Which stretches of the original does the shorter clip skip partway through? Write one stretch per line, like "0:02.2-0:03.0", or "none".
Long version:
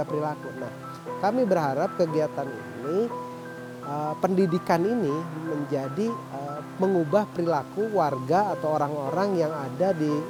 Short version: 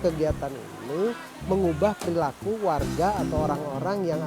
0:03.3-0:06.6